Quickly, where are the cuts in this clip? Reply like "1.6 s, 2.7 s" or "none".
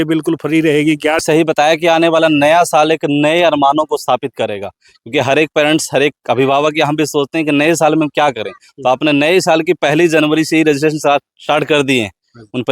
1.2 s

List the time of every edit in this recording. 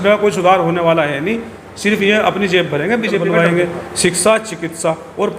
3.3 s

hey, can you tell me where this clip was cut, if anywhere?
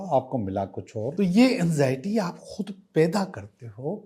1.1 s

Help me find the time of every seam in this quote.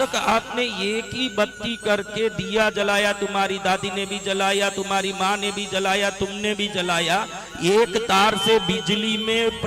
none

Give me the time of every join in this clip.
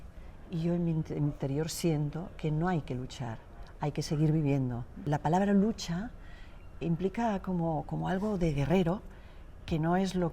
4.9 s

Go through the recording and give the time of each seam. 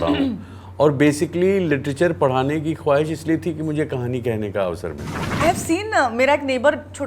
5.4 s

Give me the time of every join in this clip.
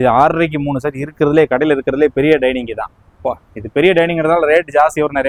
none

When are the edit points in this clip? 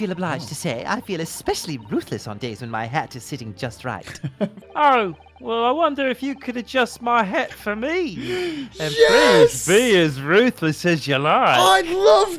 4.6 s

